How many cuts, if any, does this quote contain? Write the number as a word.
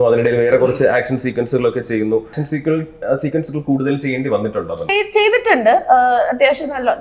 two